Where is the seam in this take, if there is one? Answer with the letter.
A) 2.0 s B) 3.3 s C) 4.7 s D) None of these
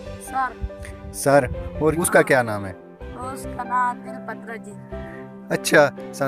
A